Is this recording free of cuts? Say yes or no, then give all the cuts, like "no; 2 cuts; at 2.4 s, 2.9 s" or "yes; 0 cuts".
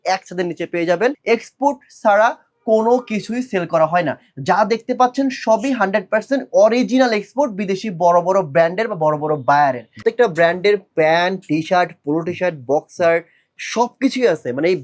no; 2 cuts; at 1.2 s, 10.0 s